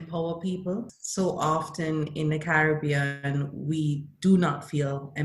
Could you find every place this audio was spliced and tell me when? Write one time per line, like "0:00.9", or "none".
0:01.0